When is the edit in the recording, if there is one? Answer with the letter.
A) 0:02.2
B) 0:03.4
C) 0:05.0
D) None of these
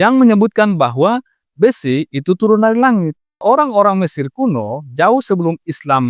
B